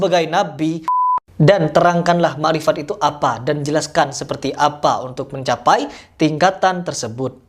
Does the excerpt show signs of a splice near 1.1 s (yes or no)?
yes